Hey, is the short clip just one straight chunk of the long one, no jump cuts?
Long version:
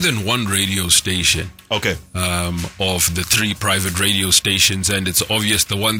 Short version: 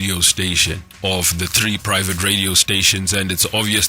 no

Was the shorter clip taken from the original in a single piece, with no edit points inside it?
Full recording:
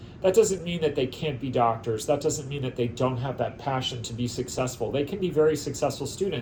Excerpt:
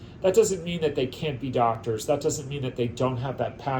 yes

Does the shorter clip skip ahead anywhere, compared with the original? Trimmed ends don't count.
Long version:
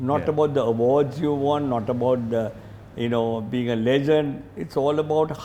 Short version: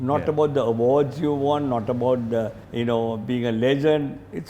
yes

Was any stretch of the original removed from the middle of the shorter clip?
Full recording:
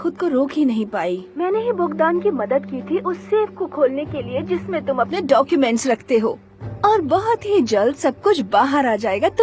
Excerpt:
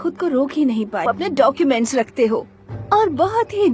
yes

